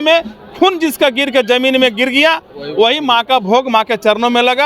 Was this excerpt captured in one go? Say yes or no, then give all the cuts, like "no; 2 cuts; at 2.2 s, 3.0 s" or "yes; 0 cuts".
yes; 0 cuts